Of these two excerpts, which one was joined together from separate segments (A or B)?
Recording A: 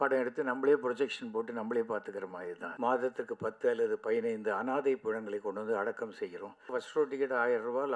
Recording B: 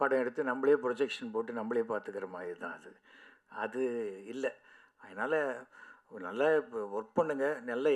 A